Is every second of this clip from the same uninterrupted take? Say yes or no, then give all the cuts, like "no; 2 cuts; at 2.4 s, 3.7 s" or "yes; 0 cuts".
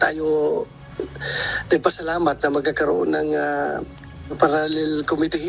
no; 1 cut; at 4.3 s